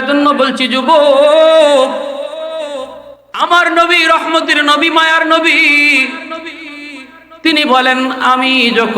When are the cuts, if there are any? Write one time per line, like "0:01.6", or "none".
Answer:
0:03.4